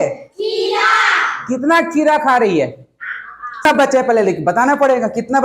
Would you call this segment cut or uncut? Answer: cut